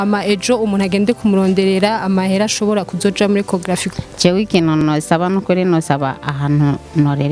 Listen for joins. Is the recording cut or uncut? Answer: cut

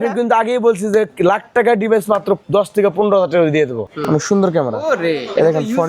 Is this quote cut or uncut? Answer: cut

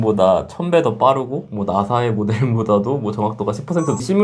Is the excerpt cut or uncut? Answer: uncut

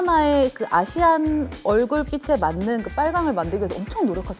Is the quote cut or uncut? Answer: uncut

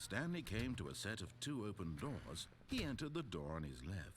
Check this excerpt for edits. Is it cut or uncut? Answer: cut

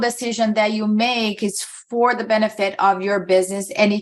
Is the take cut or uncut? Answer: uncut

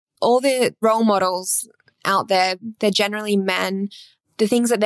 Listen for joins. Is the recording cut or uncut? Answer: uncut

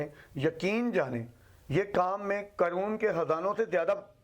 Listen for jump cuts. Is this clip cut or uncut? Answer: uncut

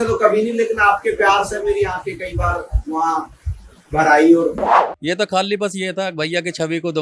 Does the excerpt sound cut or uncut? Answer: cut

